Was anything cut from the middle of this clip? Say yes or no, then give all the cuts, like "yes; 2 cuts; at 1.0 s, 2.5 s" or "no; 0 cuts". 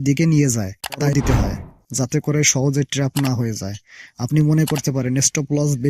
yes; 1 cut; at 1.0 s